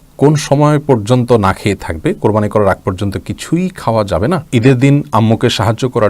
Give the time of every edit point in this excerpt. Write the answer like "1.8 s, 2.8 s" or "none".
4.4 s

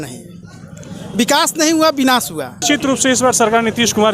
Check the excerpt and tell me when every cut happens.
2.6 s

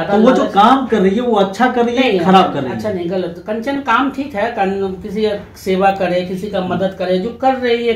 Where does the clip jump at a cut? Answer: none

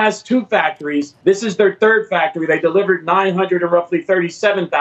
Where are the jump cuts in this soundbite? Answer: 1.1 s

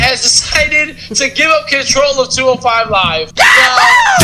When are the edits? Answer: 3.2 s

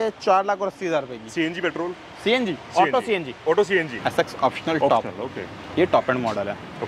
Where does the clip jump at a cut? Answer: 3.9 s

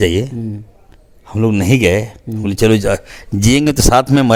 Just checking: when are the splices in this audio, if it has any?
none

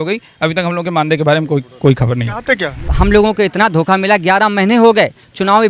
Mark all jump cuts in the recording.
2.9 s

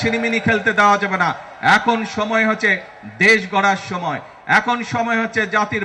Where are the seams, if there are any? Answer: none

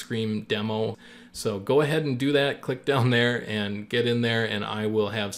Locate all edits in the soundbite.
1.1 s

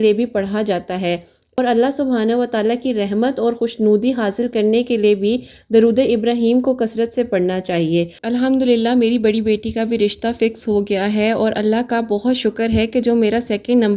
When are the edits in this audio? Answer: 8.2 s

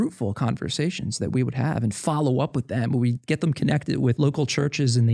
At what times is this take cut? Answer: 4.1 s

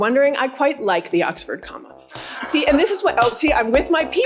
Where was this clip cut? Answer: 2.3 s

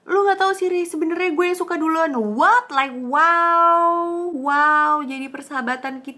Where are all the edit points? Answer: none

